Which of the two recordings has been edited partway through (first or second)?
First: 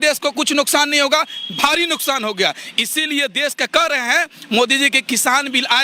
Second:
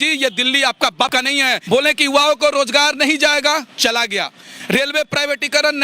second